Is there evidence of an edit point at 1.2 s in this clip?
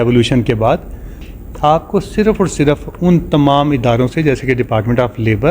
yes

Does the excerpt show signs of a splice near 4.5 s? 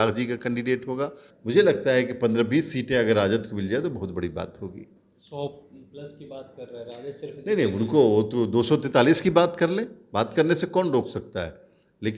no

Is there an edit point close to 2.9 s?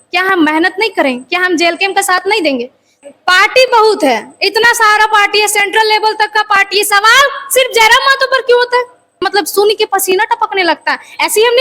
yes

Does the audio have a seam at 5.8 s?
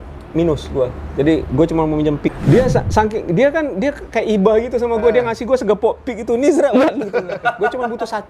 no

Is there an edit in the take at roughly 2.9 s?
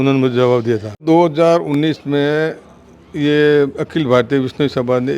no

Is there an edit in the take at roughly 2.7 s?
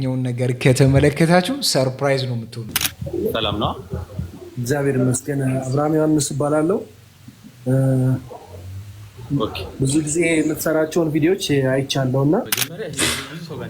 yes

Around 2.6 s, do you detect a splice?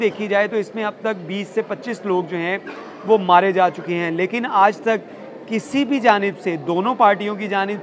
no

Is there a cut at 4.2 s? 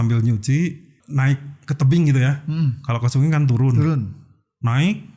no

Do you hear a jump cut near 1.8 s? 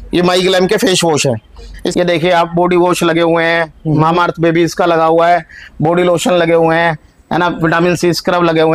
yes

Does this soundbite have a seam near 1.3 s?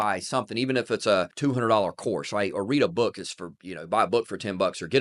yes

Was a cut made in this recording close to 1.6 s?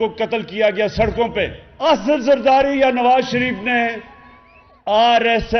yes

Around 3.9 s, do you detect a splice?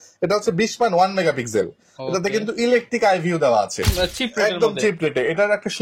yes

